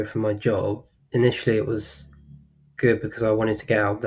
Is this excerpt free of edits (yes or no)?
no